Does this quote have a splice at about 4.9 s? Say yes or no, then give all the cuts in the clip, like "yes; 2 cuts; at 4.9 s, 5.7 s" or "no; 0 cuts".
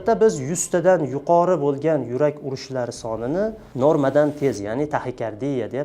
no; 1 cut; at 3.6 s